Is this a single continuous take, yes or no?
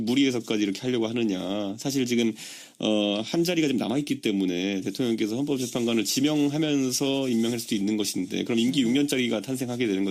no